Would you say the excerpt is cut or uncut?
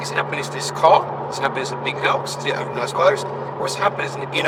uncut